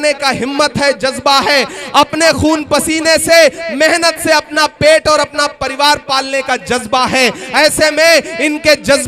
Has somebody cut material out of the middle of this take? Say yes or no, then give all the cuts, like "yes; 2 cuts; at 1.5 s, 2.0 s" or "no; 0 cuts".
yes; 1 cut; at 4.5 s